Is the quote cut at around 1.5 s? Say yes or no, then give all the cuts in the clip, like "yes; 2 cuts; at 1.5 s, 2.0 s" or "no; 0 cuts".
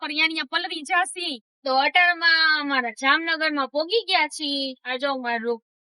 yes; 1 cut; at 1.5 s